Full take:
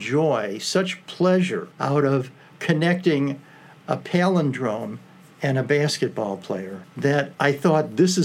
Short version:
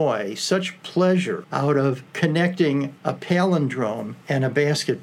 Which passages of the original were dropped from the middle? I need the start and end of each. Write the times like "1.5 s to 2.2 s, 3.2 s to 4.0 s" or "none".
1.9 s to 2.1 s, 3.4 s to 3.8 s, 5.0 s to 5.3 s